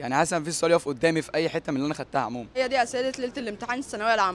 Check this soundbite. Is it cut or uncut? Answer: cut